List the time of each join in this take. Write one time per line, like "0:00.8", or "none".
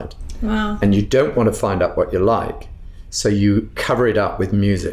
0:03.8